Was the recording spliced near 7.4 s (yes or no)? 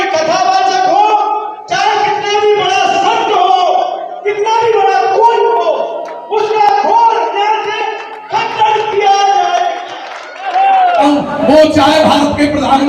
no